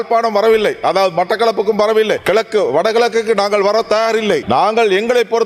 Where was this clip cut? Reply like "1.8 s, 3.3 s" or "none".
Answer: 2.2 s, 4.4 s